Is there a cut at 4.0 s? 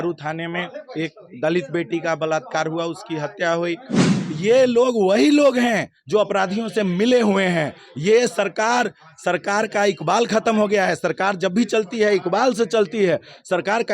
yes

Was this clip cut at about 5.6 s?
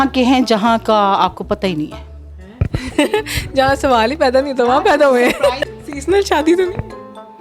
yes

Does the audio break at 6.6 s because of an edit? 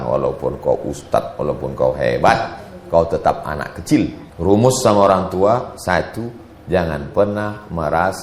no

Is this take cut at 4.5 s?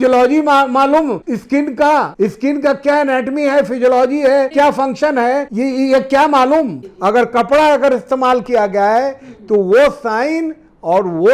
yes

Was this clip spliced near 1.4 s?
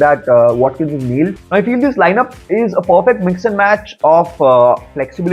yes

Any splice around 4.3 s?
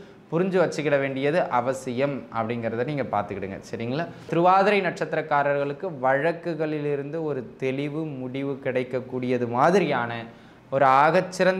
yes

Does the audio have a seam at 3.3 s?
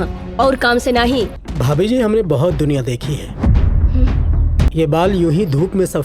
no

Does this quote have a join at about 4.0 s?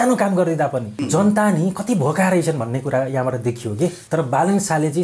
yes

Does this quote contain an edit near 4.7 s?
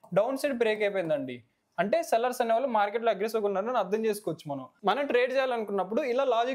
yes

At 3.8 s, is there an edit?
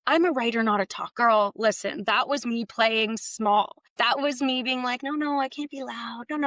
yes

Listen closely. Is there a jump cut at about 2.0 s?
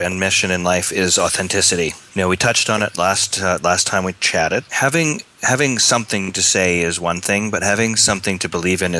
yes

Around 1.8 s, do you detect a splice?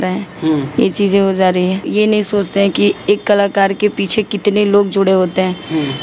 yes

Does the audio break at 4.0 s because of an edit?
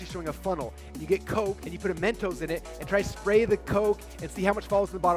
no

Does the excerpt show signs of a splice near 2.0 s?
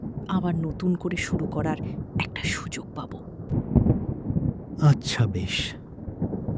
no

